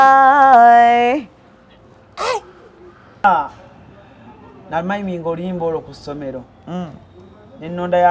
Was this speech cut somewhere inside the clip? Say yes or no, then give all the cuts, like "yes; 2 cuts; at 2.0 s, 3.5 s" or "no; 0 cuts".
yes; 1 cut; at 3.2 s